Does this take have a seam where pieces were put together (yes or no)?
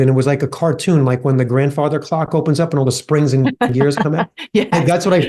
no